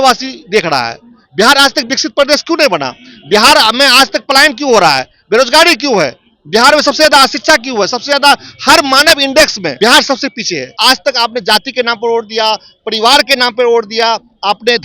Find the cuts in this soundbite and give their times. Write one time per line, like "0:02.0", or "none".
0:01.9
0:09.7
0:10.7